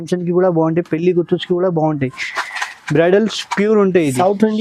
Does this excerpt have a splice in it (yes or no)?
no